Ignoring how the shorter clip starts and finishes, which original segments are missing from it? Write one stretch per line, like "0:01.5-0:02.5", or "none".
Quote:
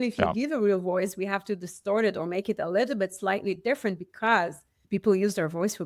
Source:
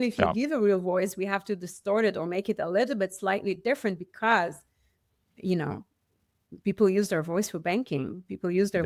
0:04.7-0:06.4